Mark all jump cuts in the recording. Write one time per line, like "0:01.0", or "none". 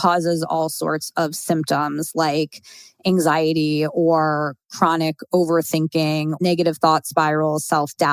0:06.4